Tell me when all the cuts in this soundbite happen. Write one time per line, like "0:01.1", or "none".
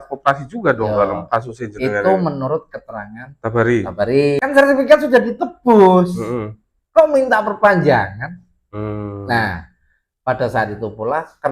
0:04.4